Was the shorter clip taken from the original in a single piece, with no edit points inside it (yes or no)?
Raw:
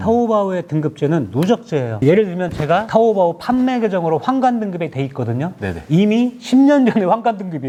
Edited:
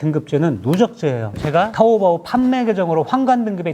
no